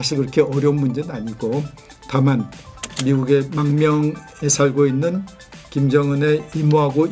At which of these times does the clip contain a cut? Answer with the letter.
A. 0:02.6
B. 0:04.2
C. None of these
A